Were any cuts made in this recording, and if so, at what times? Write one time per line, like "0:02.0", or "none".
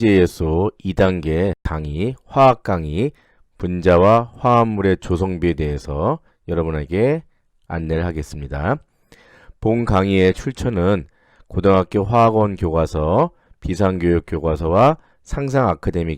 0:01.7